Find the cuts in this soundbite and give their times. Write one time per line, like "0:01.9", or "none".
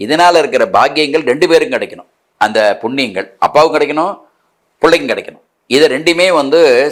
none